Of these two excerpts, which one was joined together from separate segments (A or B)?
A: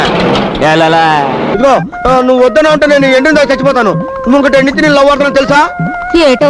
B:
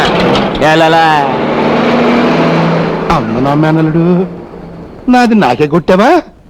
A